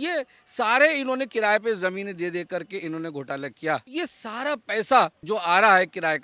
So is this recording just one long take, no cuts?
no; 2 cuts; at 3.9 s, 5.2 s

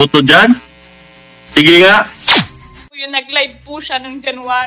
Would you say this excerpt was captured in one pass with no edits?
yes; 0 cuts

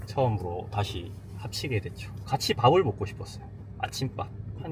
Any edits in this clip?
no; 0 cuts

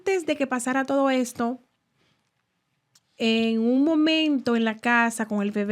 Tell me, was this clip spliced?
no; 0 cuts

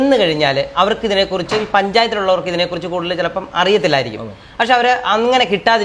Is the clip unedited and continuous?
yes; 0 cuts

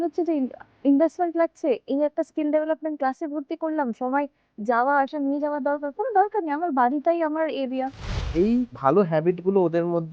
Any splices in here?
yes; 1 cut; at 8.3 s

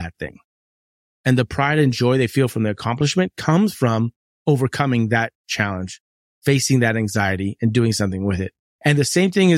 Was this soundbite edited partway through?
no; 0 cuts

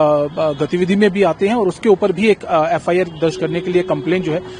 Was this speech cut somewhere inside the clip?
no; 0 cuts

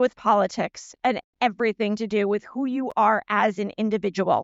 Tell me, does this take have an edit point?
no; 0 cuts

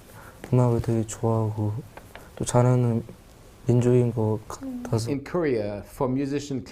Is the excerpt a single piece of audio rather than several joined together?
no; 1 cut; at 5.0 s

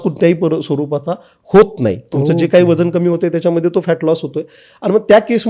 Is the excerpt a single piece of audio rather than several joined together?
yes; 0 cuts

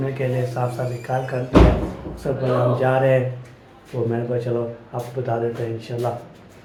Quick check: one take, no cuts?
yes; 0 cuts

